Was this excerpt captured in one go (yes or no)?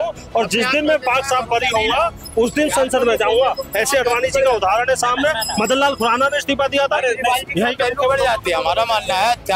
yes